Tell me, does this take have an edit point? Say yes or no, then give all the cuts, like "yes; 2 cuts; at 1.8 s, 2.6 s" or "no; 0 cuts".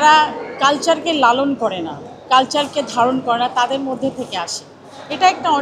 no; 0 cuts